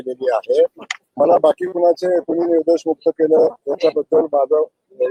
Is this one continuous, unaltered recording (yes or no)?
yes